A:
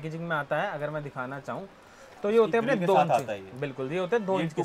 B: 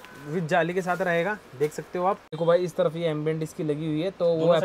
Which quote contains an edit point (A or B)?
B